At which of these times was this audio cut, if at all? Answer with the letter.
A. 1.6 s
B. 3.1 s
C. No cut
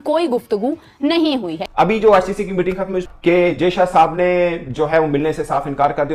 A